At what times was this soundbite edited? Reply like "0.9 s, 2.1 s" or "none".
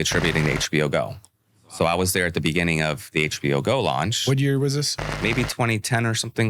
5.2 s

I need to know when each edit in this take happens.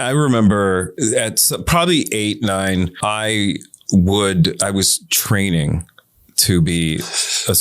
0.9 s, 2.9 s

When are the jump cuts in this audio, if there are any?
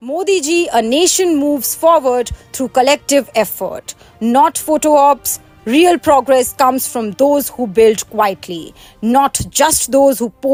none

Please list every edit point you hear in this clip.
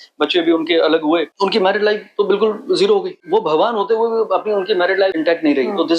1.3 s, 3.2 s, 5.1 s

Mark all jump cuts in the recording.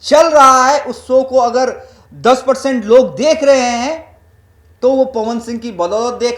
none

